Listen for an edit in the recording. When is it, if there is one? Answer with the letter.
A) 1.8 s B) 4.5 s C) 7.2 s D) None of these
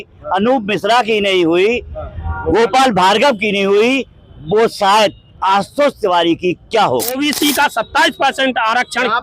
C